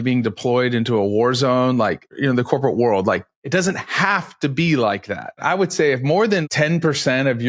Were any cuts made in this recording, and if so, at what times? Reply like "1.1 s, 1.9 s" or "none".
2.2 s, 3.4 s, 5.4 s, 6.4 s